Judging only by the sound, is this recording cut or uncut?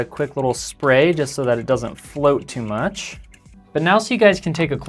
cut